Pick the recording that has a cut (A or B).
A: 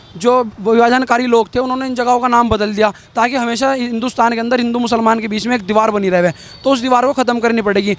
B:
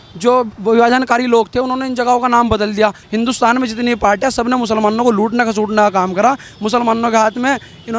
B